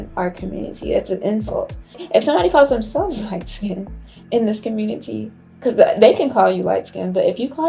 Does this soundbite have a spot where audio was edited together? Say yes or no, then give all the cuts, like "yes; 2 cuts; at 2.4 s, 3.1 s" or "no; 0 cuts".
yes; 1 cut; at 1.9 s